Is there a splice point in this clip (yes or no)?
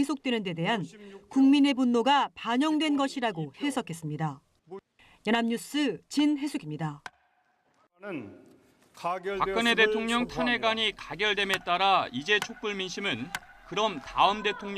yes